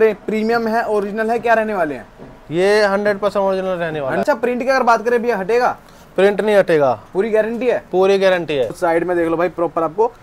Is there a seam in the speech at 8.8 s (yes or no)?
yes